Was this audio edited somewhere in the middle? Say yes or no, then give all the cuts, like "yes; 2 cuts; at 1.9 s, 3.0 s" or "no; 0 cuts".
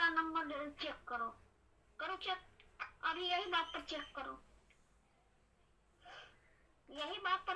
no; 0 cuts